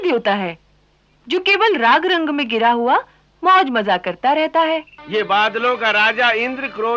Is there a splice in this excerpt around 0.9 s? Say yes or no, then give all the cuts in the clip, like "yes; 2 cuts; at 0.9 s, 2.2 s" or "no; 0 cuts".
no; 1 cut; at 5.0 s